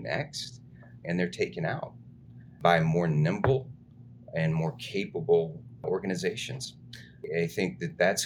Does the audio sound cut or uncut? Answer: cut